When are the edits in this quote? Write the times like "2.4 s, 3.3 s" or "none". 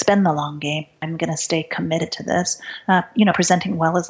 0.9 s